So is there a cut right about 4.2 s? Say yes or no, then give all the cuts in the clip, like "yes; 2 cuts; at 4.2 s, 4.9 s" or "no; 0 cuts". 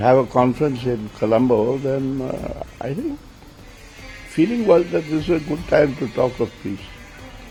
no; 0 cuts